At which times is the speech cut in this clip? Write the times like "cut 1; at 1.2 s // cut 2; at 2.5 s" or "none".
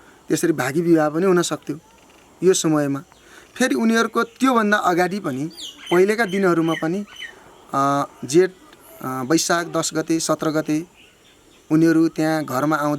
none